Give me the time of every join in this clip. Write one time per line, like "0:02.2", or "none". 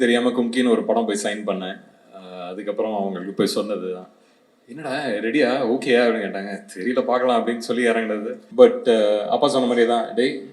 0:08.4

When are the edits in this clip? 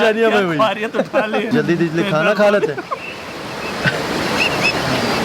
0:01.5

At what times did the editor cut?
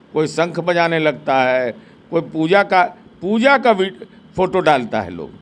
none

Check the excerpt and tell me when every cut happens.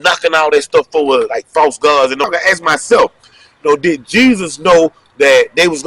0:02.3

